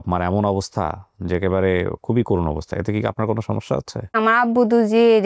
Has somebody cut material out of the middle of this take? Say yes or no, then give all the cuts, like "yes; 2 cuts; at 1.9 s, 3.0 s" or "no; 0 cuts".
yes; 1 cut; at 4.2 s